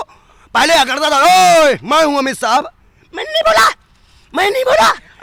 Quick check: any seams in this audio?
no; 0 cuts

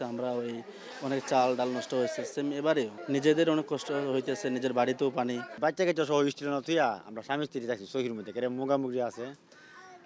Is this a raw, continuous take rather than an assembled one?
no; 2 cuts; at 3.0 s, 5.5 s

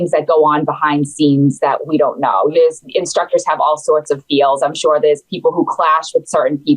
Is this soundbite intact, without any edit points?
no; 1 cut; at 2.5 s

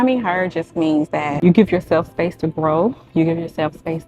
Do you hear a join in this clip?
yes; 1 cut; at 1.3 s

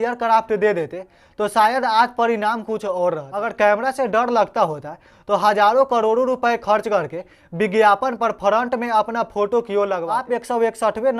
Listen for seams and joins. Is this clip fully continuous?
no; 2 cuts; at 3.4 s, 10.2 s

